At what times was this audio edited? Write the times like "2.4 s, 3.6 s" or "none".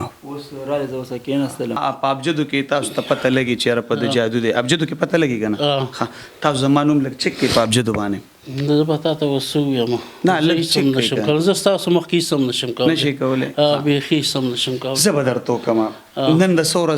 1.8 s

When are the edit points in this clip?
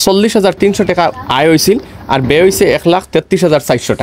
1.1 s

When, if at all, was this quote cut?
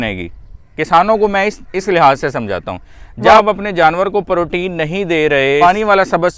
3.4 s, 5.6 s

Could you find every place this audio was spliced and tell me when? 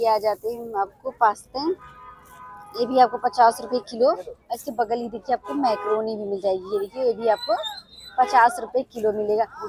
none

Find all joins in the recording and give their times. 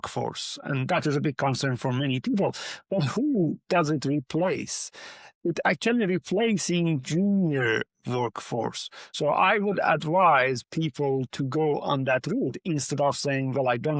9.1 s

